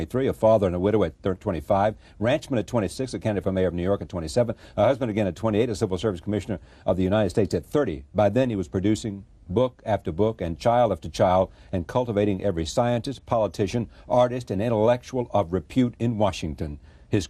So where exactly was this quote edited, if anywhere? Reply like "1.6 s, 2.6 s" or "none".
4.0 s